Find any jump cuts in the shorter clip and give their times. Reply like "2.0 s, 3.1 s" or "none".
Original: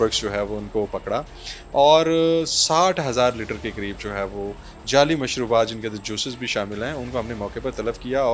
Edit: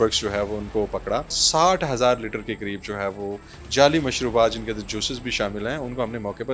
1.4 s